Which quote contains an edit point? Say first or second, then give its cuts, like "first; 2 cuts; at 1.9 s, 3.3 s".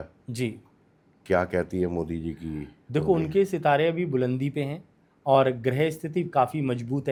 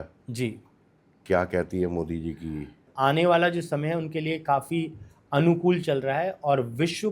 second; 1 cut; at 2.9 s